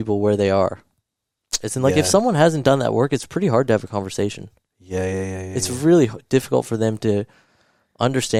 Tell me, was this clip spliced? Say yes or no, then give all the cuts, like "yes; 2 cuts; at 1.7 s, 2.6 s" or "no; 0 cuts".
no; 0 cuts